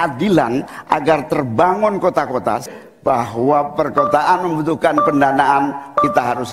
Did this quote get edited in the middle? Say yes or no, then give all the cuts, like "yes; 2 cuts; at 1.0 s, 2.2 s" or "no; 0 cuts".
yes; 1 cut; at 2.6 s